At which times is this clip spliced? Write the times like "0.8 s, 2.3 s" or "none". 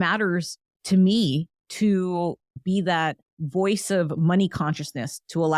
1.6 s, 2.5 s, 3.3 s